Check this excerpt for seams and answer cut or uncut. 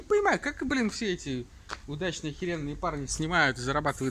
uncut